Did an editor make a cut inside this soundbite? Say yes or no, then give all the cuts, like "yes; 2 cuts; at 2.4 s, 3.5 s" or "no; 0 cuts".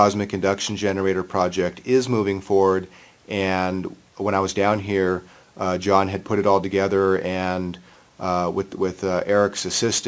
yes; 1 cut; at 5.8 s